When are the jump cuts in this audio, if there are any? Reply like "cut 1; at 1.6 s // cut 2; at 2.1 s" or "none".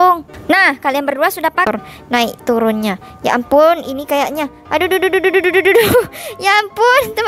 cut 1; at 1.6 s